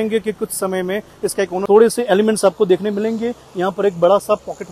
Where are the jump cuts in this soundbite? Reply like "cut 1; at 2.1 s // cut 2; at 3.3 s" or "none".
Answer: cut 1; at 1.6 s